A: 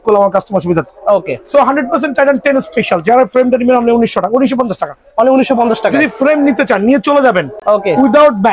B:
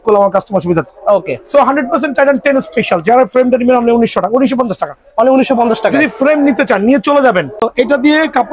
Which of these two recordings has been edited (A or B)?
B